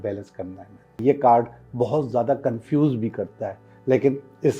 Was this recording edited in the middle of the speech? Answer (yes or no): yes